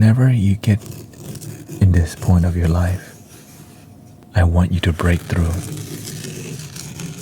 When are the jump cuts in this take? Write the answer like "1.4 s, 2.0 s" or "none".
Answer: 4.1 s